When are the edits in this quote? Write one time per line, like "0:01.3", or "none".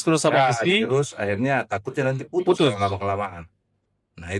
none